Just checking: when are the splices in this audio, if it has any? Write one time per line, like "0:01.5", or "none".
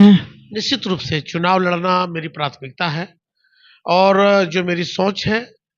none